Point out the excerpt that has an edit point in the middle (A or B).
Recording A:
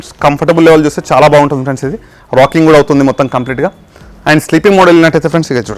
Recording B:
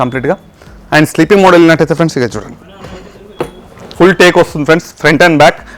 B